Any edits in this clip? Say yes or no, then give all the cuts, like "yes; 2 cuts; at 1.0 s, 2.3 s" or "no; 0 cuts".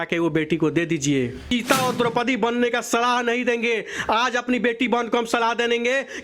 yes; 1 cut; at 1.5 s